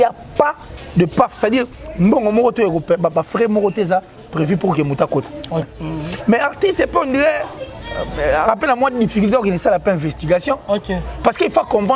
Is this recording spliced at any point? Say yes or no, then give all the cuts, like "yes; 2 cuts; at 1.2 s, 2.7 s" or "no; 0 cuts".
yes; 1 cut; at 5.8 s